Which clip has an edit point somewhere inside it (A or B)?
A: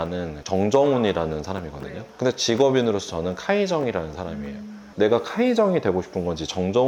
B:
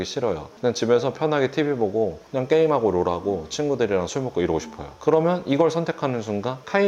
A